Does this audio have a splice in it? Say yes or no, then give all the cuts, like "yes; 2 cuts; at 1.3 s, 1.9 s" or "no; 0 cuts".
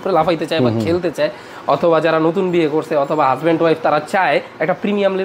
no; 0 cuts